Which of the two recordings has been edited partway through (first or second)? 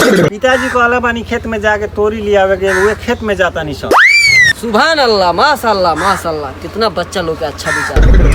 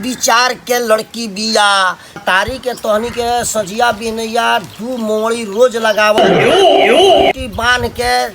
second